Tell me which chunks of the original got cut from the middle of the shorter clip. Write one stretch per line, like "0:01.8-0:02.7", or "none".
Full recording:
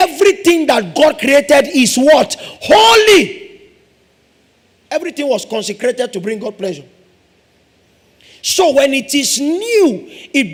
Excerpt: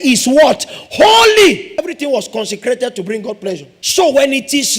0:03.4-0:04.9
0:06.9-0:08.4